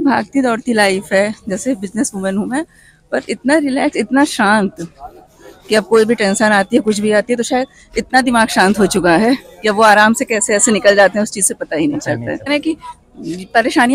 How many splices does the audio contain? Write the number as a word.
one